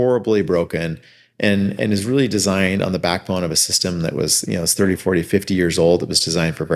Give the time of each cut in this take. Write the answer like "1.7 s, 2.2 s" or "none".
none